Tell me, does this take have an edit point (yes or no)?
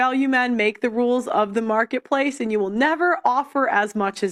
no